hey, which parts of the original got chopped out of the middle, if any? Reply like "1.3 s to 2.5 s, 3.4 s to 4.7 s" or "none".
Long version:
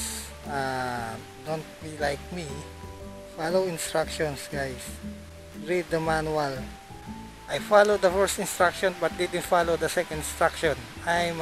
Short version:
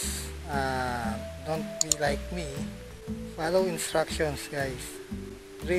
none